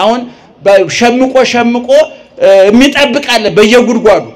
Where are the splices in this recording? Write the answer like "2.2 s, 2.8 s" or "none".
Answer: none